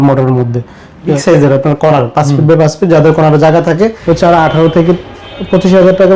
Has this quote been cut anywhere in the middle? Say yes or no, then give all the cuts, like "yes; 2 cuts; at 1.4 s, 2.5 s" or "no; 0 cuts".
yes; 2 cuts; at 1.2 s, 4.0 s